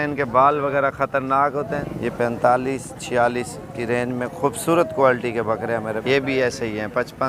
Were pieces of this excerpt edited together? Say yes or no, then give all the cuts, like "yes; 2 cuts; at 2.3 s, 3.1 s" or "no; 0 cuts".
yes; 2 cuts; at 1.8 s, 6.0 s